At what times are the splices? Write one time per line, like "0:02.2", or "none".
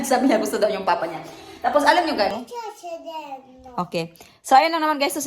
0:02.3